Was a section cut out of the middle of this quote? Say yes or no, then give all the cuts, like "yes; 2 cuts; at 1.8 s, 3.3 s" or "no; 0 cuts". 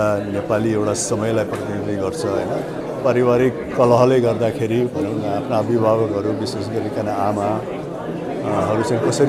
yes; 1 cut; at 2.8 s